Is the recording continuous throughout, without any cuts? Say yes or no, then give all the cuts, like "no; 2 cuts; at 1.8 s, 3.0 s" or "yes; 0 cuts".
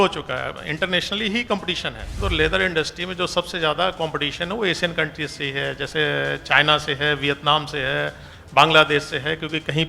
no; 1 cut; at 2.1 s